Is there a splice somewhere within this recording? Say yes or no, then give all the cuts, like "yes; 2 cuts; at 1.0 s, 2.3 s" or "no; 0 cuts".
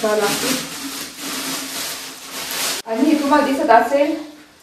yes; 1 cut; at 2.8 s